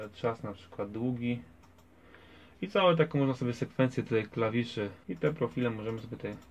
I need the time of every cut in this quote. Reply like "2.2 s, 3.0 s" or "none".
5.0 s